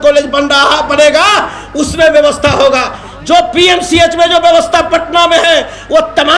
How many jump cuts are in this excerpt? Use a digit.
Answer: 0